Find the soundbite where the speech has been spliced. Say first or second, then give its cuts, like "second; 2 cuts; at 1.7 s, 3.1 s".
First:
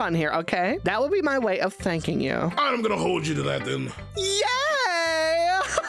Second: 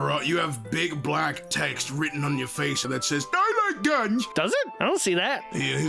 second; 1 cut; at 2.8 s